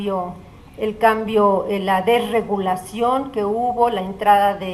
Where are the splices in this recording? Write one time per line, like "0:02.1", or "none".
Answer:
0:02.3